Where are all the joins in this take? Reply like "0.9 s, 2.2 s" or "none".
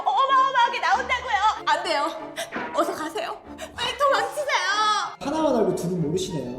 5.2 s